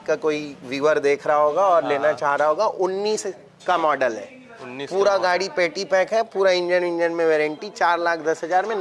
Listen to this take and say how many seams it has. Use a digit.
0